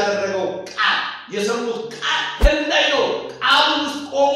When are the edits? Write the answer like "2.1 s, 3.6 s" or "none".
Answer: 2.3 s